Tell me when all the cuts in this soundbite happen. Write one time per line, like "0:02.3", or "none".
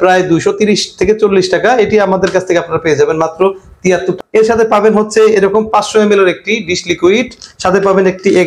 0:04.2